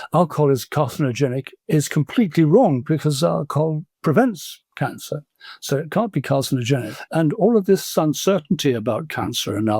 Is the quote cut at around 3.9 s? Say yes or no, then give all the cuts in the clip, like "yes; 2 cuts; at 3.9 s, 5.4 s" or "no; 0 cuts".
yes; 3 cuts; at 2.8 s, 3.9 s, 7.0 s